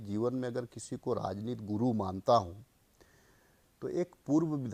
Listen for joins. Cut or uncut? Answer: uncut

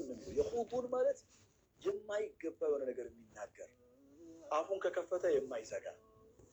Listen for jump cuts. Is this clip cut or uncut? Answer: uncut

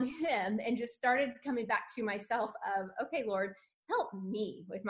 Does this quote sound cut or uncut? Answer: uncut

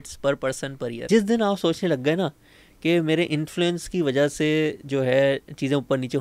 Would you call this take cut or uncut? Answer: cut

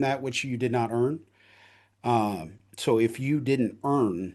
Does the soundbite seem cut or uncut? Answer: uncut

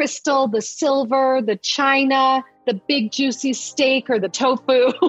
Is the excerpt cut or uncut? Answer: cut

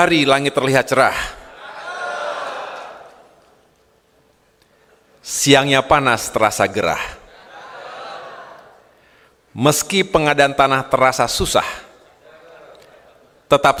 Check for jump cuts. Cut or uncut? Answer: uncut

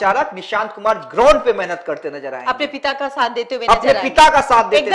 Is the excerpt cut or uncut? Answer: uncut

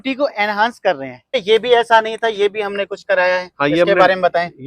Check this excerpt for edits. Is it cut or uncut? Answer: cut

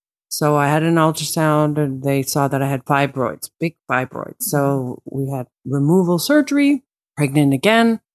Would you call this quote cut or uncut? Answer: cut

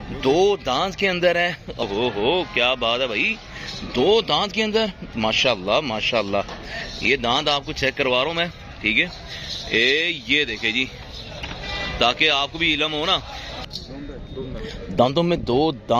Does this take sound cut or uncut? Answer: cut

